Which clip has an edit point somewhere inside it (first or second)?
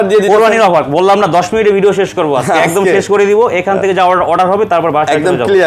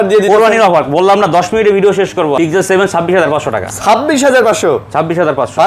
second